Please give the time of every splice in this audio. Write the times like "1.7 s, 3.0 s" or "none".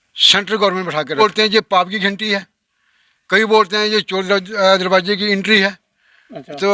1.2 s